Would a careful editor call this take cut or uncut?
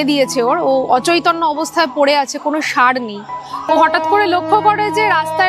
cut